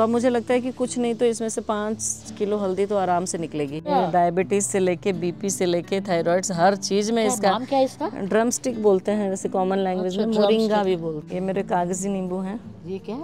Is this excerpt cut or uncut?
cut